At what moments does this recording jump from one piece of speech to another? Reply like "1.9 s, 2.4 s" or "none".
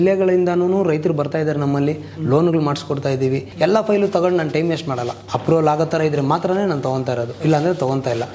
3.5 s, 5.2 s, 7.3 s